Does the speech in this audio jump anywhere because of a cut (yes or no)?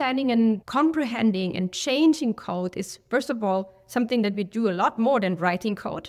no